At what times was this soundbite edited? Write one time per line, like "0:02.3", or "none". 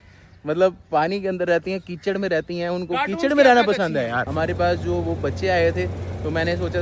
0:04.3